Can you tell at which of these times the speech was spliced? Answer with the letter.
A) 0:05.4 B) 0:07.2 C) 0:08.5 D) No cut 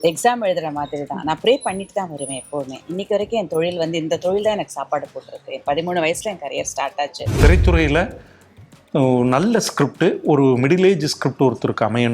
B